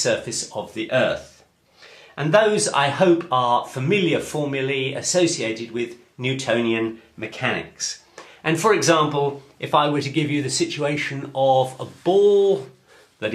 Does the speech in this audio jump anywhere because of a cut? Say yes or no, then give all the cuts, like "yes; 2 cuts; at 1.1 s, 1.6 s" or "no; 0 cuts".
yes; 1 cut; at 2.4 s